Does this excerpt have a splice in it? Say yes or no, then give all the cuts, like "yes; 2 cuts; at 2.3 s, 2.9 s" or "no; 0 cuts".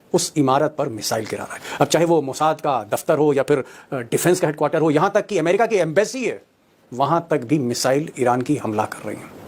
no; 0 cuts